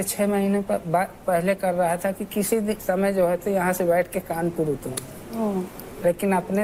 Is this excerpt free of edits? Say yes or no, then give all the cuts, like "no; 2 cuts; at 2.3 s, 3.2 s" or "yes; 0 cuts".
yes; 0 cuts